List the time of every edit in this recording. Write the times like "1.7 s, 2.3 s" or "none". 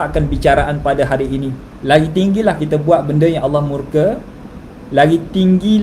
1.7 s